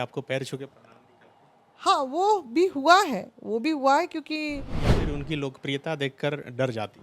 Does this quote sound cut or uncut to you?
cut